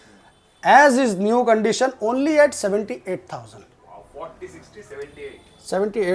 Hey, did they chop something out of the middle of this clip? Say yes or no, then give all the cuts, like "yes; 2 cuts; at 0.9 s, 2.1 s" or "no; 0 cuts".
no; 0 cuts